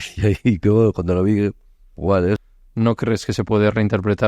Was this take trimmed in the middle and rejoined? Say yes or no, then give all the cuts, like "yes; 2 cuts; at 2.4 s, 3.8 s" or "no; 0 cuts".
yes; 1 cut; at 2.4 s